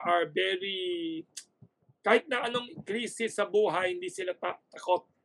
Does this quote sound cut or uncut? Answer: uncut